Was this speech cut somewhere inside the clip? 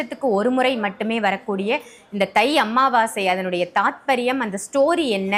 no; 0 cuts

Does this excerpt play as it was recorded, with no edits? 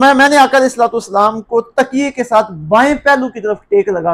yes; 0 cuts

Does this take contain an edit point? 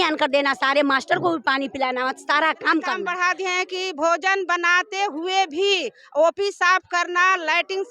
yes; 1 cut; at 3.1 s

